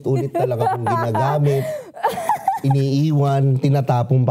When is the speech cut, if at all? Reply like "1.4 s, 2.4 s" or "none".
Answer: none